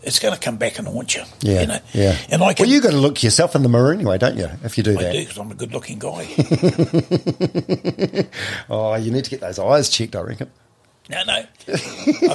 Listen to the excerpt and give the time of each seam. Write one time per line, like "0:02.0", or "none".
none